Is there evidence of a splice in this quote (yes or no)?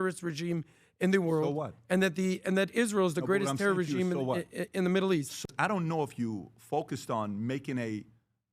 yes